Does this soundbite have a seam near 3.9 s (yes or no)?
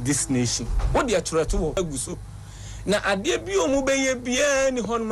no